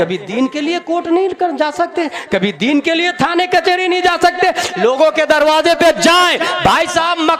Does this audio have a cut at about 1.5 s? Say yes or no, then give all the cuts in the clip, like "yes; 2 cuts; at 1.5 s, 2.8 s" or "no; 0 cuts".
no; 0 cuts